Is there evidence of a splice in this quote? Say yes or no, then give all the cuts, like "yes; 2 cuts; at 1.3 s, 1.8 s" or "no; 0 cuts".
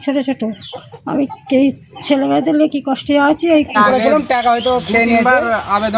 yes; 1 cut; at 3.7 s